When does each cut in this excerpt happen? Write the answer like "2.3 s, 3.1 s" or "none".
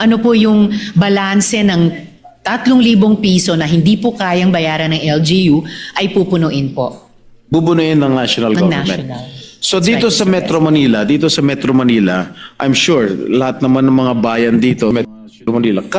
14.9 s